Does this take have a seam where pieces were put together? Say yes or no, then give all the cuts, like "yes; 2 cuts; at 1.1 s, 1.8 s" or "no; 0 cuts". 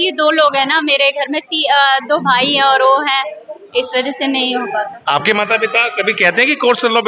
no; 0 cuts